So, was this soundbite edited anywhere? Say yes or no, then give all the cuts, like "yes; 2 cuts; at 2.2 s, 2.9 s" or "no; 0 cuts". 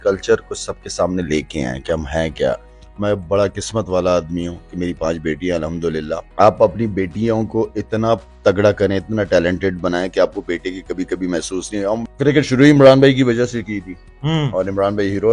yes; 3 cuts; at 2.7 s, 6.3 s, 12.0 s